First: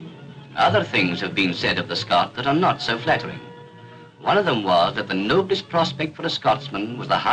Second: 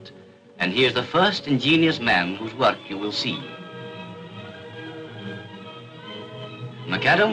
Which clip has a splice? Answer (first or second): first